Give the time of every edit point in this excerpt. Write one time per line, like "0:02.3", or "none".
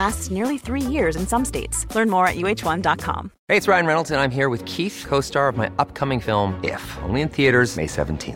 0:03.3